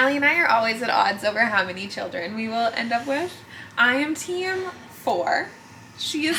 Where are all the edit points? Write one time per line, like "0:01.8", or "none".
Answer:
none